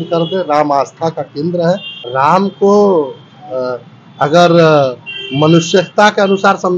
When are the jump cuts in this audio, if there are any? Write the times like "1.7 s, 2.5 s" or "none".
2.0 s